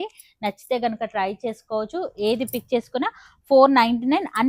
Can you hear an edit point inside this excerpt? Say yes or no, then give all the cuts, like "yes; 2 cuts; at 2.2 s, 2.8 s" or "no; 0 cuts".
no; 0 cuts